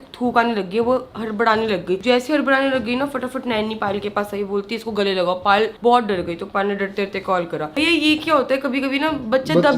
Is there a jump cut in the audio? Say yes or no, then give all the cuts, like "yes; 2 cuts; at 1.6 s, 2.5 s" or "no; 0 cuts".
no; 0 cuts